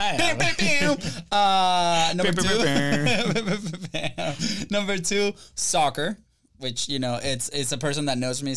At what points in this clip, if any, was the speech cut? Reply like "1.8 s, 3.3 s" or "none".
none

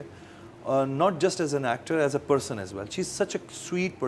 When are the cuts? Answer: none

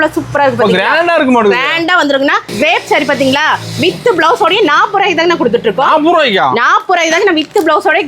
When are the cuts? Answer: 2.5 s

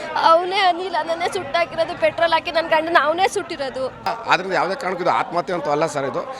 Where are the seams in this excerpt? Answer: 4.1 s

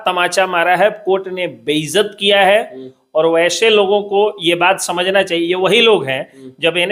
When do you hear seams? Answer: none

